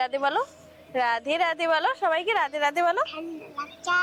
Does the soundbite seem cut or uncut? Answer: uncut